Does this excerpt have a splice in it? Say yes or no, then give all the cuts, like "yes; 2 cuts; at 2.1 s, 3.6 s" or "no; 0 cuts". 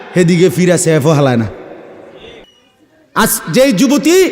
yes; 1 cut; at 2.5 s